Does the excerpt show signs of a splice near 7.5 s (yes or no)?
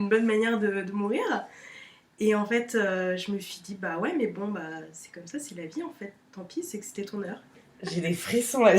yes